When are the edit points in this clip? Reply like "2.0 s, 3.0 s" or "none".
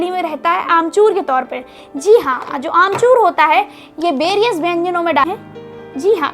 5.2 s